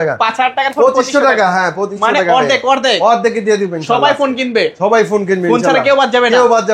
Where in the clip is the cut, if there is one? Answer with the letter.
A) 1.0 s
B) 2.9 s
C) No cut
C